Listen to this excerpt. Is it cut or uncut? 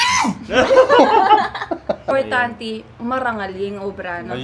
cut